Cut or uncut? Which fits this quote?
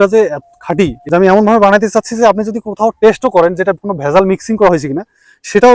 cut